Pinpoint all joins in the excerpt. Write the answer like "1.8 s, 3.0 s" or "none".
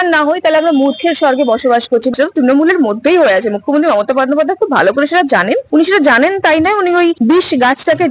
2.1 s, 5.6 s, 7.2 s